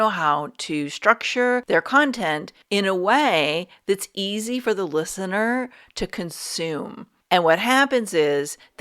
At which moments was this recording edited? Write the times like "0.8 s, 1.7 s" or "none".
1.6 s, 2.5 s, 7.1 s